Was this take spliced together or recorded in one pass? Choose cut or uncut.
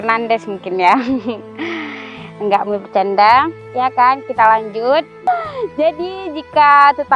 cut